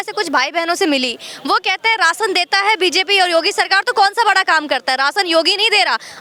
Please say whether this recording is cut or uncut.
uncut